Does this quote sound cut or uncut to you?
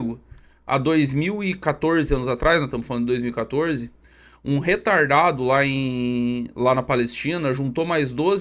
uncut